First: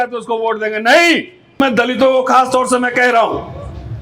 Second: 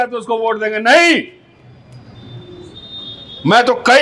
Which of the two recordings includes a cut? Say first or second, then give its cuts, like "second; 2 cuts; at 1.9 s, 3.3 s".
first; 1 cut; at 1.6 s